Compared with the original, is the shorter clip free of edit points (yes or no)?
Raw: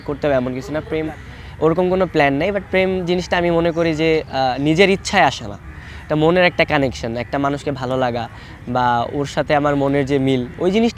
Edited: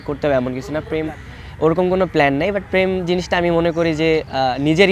yes